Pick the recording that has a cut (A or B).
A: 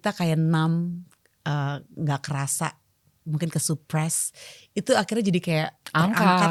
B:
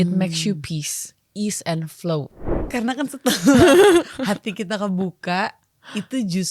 B